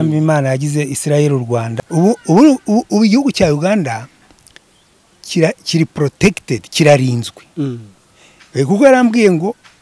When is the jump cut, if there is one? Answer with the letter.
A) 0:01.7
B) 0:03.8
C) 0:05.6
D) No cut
A